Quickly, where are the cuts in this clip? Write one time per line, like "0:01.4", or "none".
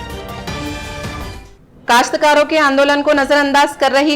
0:01.3